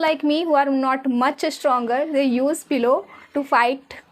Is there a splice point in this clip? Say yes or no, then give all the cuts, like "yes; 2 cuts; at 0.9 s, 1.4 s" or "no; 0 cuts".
no; 0 cuts